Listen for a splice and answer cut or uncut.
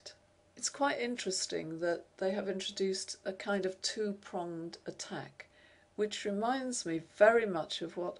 uncut